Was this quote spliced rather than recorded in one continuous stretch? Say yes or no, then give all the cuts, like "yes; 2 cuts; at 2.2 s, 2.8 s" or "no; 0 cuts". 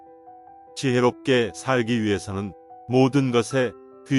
no; 0 cuts